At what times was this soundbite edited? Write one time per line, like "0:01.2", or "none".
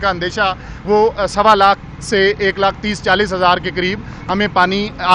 none

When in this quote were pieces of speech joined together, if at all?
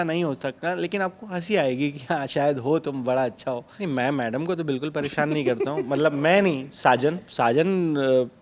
0:03.7
0:07.3

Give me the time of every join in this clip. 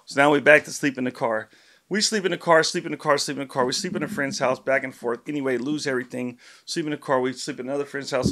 none

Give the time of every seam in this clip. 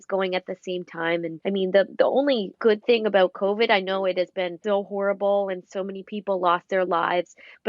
0:01.3
0:02.6
0:04.6

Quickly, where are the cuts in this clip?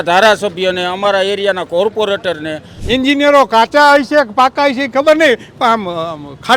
0:02.7

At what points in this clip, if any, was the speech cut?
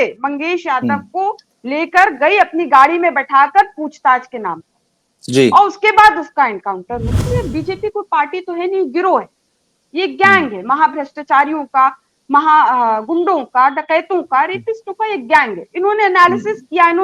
0:07.2

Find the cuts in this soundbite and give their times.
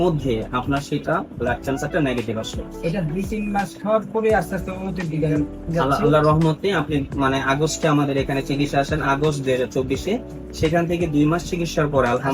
none

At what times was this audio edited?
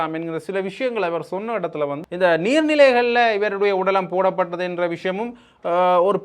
0:02.0

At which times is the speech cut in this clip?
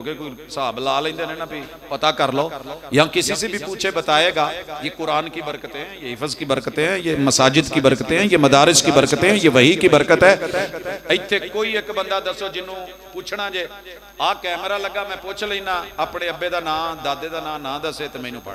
none

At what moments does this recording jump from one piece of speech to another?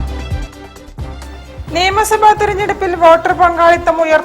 0:01.1

